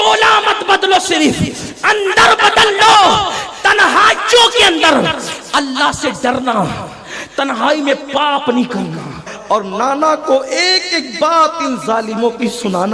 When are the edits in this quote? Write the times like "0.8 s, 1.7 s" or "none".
9.3 s